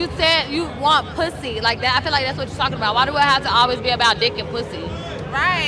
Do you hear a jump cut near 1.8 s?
yes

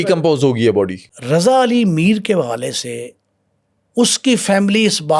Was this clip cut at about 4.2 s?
no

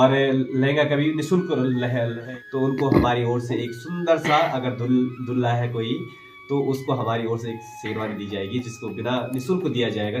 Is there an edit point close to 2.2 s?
yes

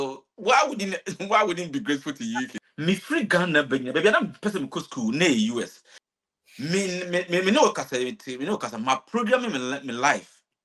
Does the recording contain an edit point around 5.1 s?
no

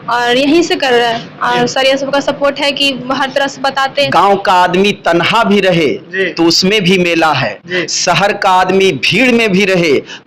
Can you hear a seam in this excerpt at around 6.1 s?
no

